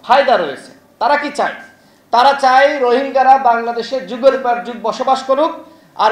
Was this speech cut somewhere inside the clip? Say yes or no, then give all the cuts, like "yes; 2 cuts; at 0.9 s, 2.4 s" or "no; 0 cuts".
no; 0 cuts